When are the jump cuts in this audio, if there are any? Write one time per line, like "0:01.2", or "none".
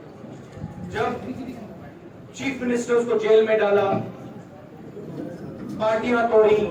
none